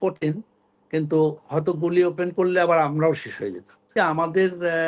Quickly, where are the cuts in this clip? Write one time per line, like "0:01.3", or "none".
0:03.9